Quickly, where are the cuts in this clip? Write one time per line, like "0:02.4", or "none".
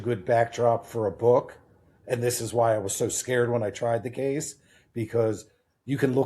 0:02.0